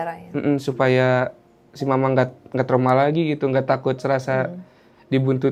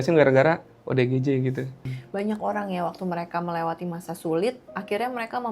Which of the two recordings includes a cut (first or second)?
second